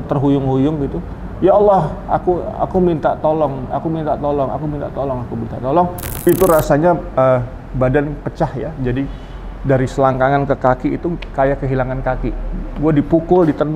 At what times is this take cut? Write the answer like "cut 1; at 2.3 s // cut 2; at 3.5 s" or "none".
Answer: cut 1; at 6.1 s